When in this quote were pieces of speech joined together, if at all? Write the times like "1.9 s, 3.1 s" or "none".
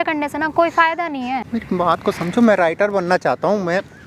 1.4 s